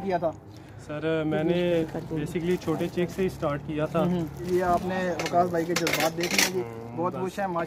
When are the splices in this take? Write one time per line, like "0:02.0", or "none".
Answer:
0:04.5